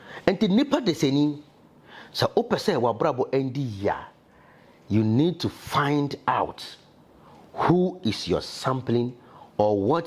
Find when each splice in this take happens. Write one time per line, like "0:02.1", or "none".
none